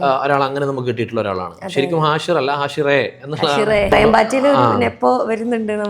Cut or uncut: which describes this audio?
cut